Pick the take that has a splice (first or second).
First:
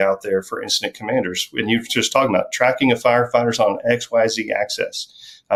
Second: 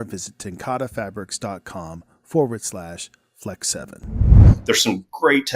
second